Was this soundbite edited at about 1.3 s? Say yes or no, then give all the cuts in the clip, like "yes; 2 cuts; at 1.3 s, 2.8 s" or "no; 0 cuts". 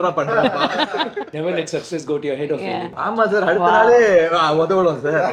yes; 2 cuts; at 1.3 s, 2.9 s